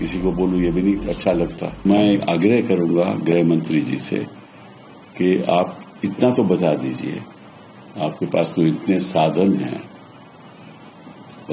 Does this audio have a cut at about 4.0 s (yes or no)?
no